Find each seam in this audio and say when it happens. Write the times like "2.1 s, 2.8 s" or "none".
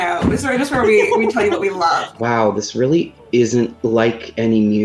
2.1 s, 3.7 s